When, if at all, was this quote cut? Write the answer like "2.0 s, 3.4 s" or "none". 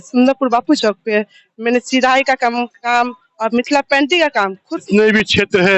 4.9 s